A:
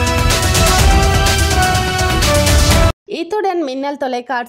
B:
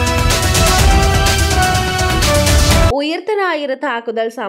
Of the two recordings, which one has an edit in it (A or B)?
B